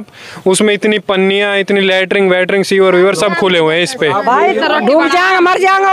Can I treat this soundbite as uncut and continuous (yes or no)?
no